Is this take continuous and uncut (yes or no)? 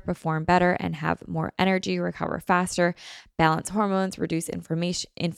yes